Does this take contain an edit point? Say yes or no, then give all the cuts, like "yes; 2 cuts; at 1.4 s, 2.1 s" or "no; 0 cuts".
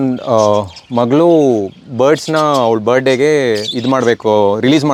no; 0 cuts